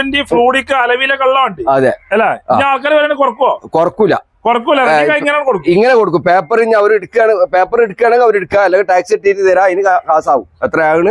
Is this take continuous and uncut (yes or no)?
yes